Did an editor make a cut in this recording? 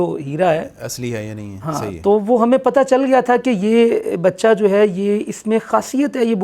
no; 0 cuts

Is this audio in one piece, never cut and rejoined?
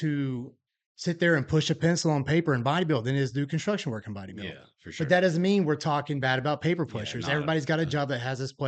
yes; 0 cuts

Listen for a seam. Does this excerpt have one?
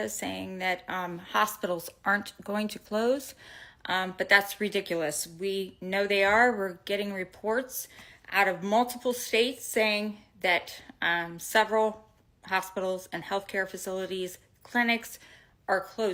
no; 0 cuts

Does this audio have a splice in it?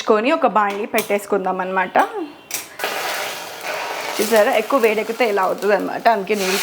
yes; 1 cut; at 2.7 s

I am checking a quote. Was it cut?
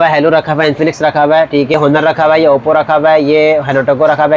yes; 1 cut; at 1.7 s

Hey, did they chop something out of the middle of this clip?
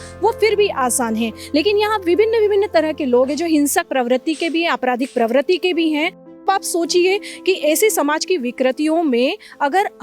yes; 1 cut; at 6.4 s

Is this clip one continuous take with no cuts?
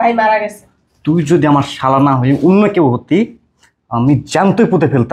yes; 0 cuts

